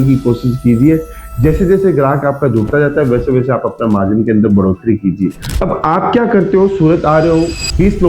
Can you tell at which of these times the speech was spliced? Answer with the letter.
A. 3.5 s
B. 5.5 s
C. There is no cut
B